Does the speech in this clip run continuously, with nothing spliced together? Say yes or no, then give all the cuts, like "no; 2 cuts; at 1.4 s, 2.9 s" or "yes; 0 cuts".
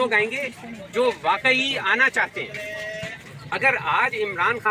no; 1 cut; at 3.6 s